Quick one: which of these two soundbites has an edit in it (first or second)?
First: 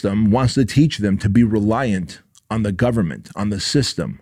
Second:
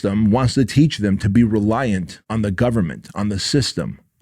second